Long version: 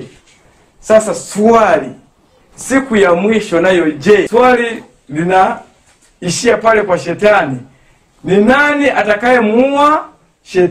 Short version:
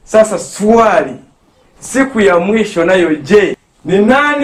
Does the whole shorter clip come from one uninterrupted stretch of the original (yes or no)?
no